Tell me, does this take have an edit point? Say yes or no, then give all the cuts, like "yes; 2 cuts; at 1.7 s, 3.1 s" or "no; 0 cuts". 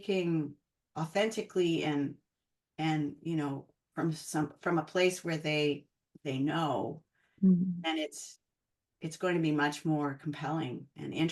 no; 0 cuts